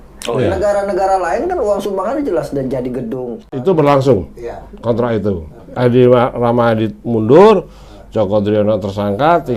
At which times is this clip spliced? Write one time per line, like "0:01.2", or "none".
0:03.4